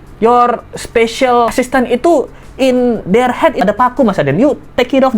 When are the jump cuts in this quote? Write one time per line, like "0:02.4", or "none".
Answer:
0:01.5
0:03.6